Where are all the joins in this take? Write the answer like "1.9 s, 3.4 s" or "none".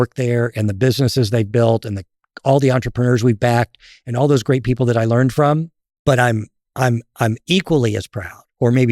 5.8 s